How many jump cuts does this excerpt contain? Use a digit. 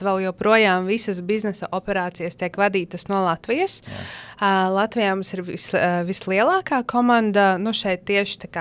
0